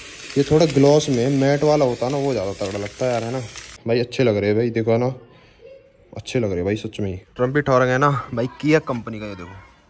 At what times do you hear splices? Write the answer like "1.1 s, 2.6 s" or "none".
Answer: 3.7 s, 7.3 s